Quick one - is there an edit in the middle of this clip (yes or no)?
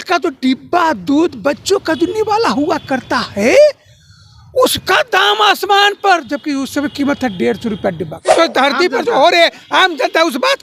yes